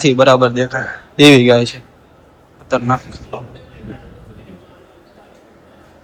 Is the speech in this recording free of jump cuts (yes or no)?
yes